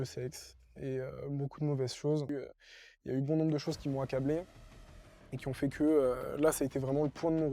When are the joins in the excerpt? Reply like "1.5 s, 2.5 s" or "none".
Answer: 2.3 s

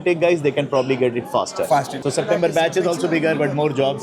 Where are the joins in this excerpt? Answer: 1.9 s

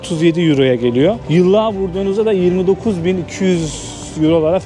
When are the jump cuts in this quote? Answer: 1.2 s

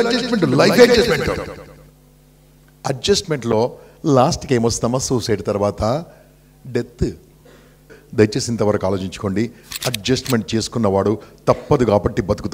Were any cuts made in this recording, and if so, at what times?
8.0 s

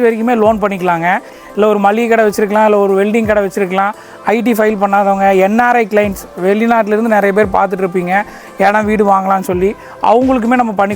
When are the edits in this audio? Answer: 1.4 s

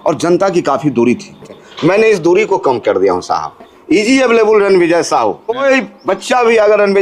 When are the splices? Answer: 1.6 s, 3.7 s, 5.6 s

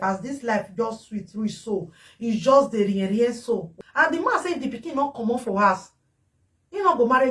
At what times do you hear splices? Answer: 3.7 s

